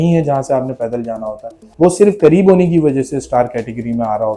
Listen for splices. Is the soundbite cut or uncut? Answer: cut